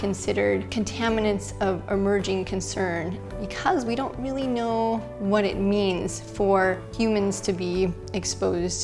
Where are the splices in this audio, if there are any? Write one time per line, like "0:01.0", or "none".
0:03.2
0:06.9